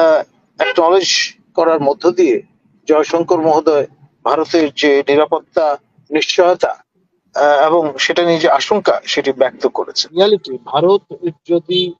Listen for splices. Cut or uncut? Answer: cut